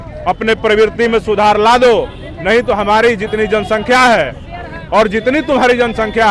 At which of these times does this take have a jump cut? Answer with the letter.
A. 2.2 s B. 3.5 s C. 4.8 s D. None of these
D